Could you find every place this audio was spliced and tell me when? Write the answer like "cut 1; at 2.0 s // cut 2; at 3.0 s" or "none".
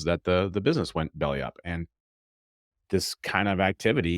none